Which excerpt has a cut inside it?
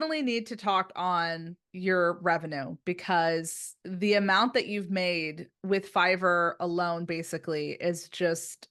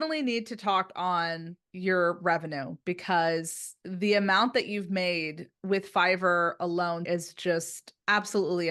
second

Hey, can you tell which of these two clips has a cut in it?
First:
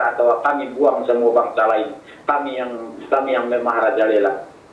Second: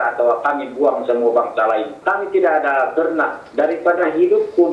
second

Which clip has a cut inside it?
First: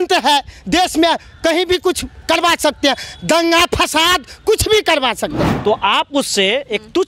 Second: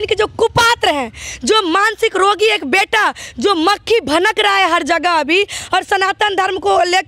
first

